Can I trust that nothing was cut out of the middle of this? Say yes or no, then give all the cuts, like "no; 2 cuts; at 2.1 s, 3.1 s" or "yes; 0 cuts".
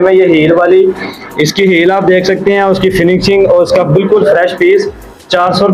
yes; 0 cuts